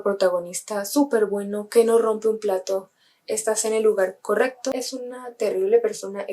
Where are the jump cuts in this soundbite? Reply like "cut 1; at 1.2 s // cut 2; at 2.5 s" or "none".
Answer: cut 1; at 4.7 s